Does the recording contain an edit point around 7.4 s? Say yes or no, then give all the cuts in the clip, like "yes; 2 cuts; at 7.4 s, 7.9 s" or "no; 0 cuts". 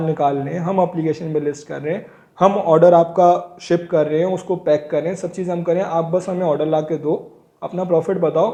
no; 0 cuts